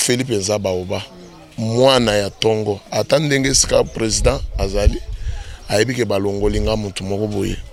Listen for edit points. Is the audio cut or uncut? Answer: uncut